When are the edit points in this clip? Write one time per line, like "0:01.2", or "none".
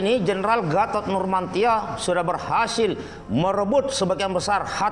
none